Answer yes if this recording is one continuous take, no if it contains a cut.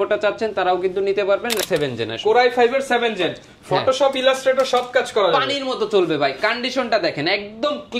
no